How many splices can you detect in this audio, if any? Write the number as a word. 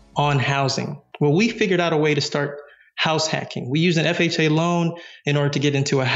zero